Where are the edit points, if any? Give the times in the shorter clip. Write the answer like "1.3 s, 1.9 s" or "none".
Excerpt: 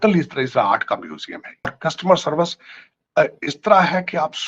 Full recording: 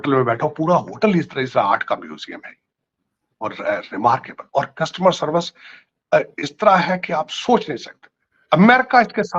1.8 s

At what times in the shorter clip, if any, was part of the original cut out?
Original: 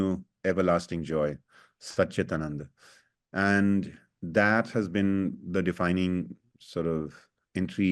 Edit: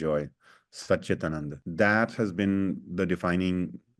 1.5 s

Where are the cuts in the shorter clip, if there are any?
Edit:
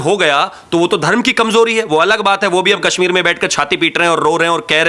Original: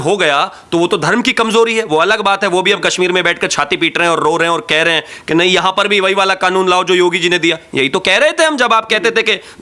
none

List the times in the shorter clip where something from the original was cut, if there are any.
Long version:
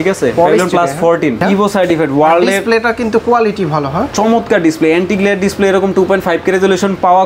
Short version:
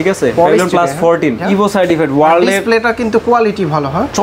none

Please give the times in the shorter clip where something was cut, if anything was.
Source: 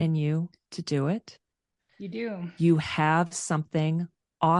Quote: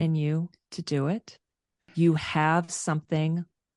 1.8 s

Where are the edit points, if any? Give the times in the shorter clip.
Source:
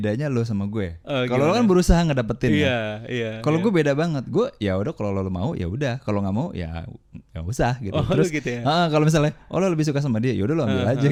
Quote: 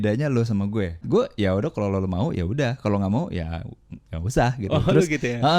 1.0 s

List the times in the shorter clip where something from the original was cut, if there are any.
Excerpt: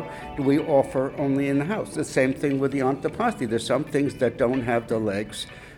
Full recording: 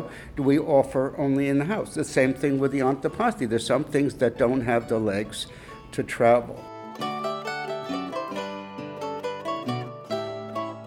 none

